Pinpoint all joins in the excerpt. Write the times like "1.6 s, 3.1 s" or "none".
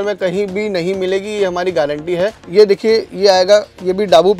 2.3 s